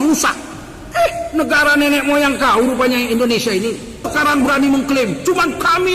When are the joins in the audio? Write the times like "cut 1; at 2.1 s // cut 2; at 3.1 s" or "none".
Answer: cut 1; at 4.0 s